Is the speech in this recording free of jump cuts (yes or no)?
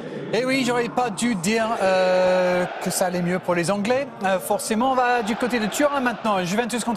no